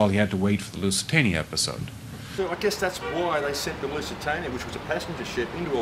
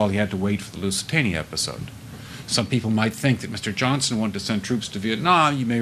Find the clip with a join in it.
second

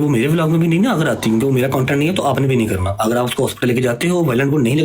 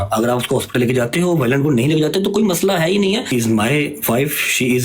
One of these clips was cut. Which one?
second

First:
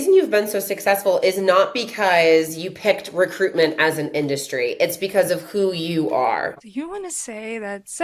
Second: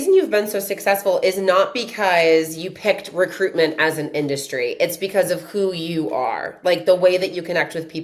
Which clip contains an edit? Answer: first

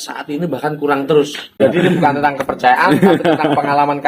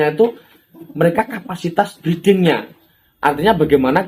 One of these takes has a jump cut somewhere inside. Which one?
first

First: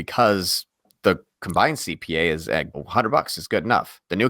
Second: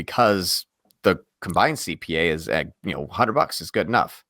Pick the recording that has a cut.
first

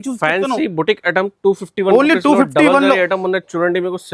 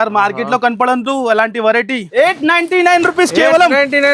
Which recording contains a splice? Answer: second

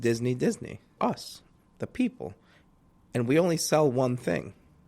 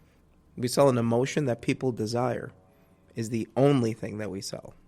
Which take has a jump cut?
first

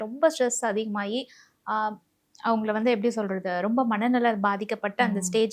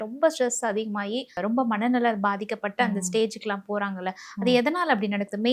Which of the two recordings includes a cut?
second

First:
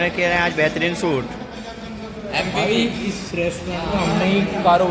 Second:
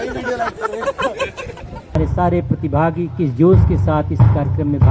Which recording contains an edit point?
second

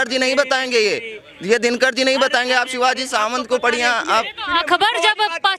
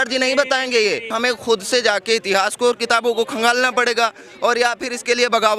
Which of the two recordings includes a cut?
second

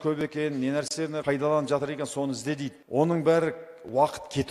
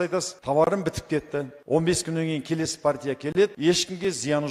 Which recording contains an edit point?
first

